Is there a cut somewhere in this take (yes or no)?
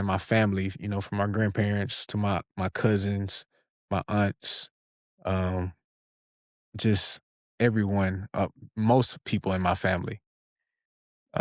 no